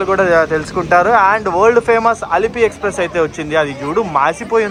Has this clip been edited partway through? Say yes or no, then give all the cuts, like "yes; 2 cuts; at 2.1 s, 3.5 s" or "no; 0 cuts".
no; 0 cuts